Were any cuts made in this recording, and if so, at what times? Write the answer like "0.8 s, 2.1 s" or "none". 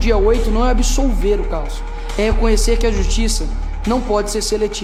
none